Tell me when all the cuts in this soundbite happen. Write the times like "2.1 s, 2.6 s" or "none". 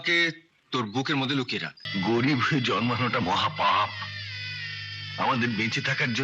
1.8 s